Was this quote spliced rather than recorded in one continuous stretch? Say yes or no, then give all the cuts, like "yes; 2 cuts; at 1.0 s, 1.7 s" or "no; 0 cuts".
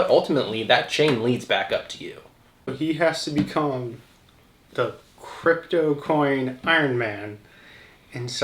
yes; 1 cut; at 2.7 s